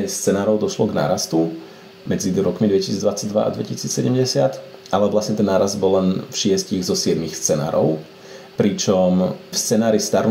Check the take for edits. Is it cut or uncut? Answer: uncut